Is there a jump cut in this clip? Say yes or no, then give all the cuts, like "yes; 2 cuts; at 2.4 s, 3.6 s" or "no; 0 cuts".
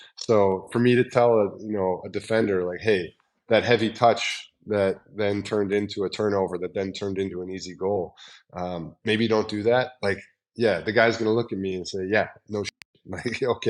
no; 0 cuts